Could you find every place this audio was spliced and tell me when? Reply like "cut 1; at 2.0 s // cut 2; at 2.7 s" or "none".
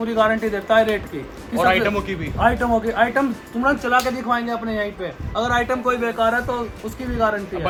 none